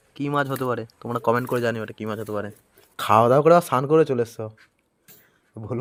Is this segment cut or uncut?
uncut